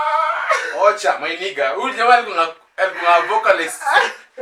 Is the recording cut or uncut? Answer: uncut